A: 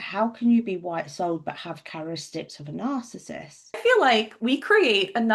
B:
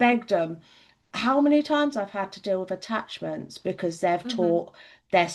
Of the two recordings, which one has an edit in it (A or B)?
A